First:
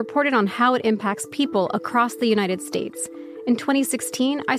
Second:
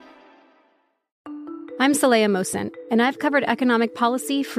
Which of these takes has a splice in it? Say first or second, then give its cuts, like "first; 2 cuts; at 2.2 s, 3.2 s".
second; 1 cut; at 1.1 s